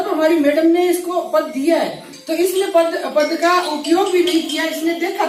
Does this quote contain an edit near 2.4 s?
no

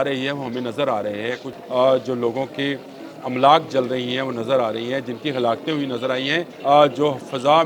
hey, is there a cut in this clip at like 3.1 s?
no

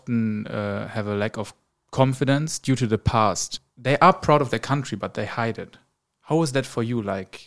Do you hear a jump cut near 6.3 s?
no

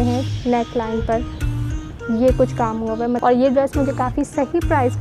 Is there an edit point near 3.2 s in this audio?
yes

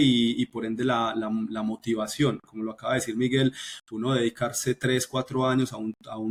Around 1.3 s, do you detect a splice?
no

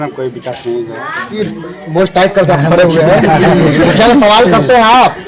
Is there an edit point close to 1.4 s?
yes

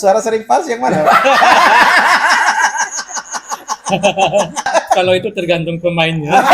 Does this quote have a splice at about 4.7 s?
yes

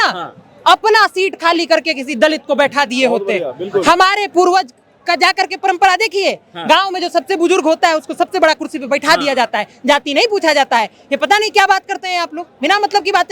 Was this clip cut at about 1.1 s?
no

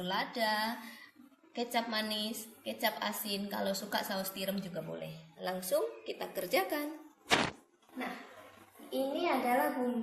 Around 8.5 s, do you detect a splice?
no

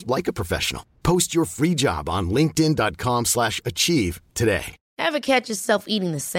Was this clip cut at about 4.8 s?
yes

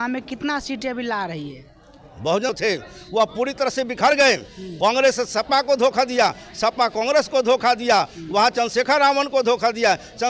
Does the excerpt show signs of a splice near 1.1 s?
no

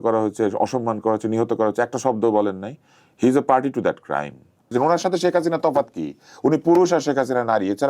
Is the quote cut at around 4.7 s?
yes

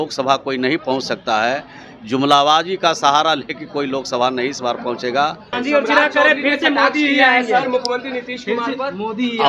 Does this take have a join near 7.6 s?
no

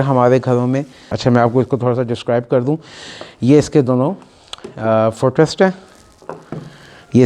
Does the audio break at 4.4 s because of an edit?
no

